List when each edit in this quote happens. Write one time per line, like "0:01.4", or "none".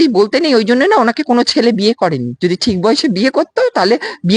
0:02.3